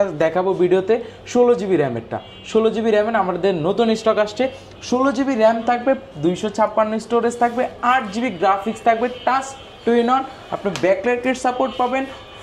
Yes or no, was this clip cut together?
no